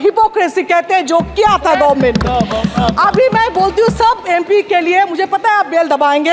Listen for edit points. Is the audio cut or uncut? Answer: uncut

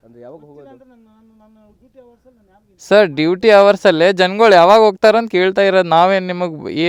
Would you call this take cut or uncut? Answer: uncut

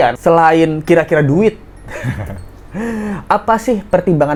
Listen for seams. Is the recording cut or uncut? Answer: uncut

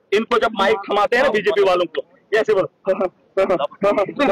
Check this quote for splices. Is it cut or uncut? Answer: uncut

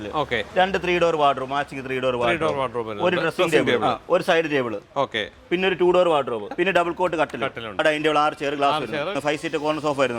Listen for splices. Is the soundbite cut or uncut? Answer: cut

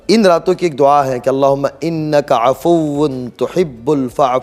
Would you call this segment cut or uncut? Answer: uncut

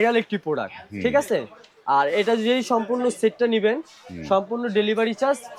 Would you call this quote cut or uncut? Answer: uncut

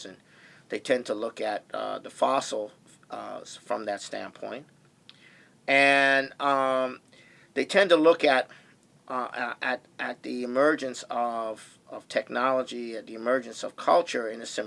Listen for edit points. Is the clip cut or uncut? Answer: cut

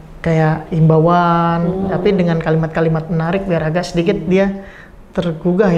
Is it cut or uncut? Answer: uncut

